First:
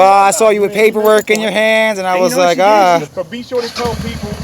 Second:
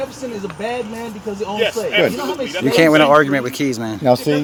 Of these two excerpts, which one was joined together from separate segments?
first; 1 cut; at 3.1 s

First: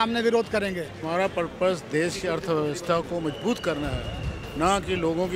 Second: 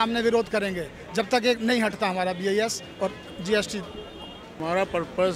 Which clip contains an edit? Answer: first; 1 cut; at 0.9 s

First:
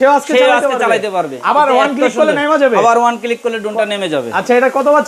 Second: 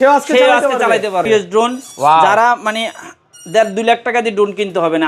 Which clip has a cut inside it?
second; 1 cut; at 1.2 s

